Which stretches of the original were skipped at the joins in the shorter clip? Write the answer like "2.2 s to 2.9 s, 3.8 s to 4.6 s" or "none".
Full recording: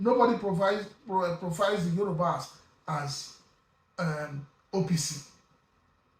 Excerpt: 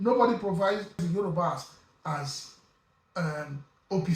1.0 s to 1.8 s